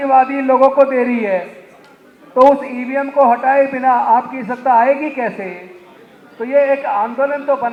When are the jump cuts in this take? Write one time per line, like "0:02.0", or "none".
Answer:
none

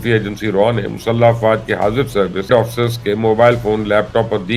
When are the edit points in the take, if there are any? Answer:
0:02.5

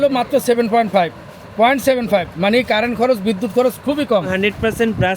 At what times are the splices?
0:04.3

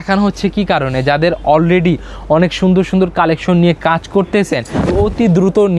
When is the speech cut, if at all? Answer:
0:04.8

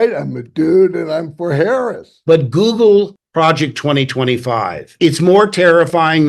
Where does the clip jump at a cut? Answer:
0:02.0

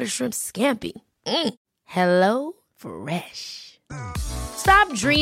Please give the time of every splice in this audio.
none

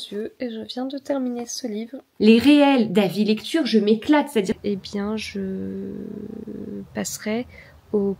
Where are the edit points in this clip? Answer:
0:02.0
0:04.6

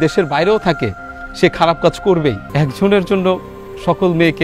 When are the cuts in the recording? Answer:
0:02.4

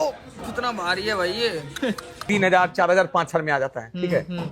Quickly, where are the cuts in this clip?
0:02.1

